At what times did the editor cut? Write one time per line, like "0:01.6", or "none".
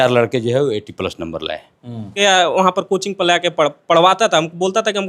0:02.1